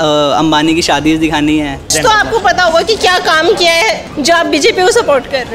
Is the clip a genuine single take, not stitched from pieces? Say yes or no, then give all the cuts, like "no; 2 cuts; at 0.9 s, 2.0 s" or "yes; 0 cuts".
no; 2 cuts; at 1.9 s, 4.2 s